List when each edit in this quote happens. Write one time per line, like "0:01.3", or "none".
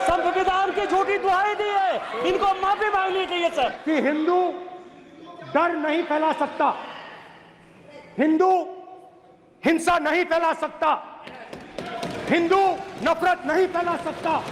0:03.8

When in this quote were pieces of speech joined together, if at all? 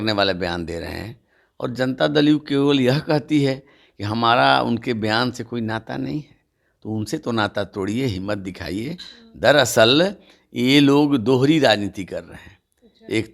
none

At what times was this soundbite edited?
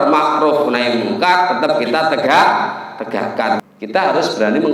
0:03.6

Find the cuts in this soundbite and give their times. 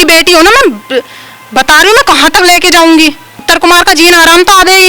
0:03.3

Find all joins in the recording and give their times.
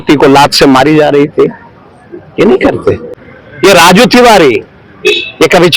0:03.1

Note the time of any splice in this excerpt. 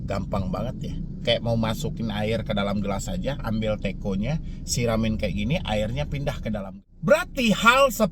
0:06.6

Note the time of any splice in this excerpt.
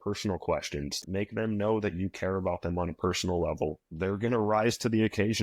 0:01.0

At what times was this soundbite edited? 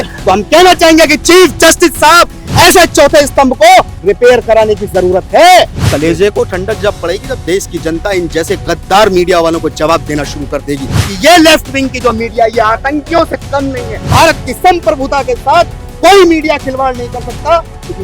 0:05.8
0:11.0
0:14.1

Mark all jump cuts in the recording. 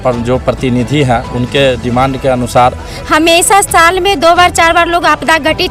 0:02.9

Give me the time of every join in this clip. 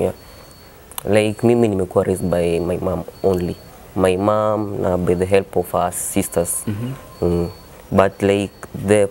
none

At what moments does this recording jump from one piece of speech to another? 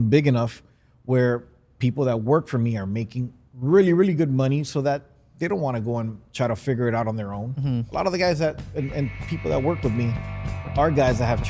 none

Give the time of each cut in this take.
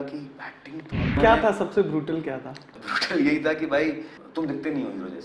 0:01.2

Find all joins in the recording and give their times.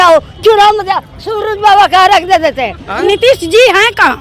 0:03.1

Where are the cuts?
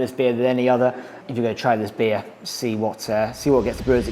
0:01.2

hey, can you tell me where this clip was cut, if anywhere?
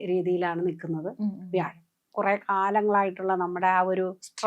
0:02.1

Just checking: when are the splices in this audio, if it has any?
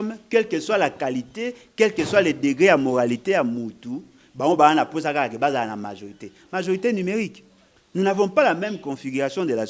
none

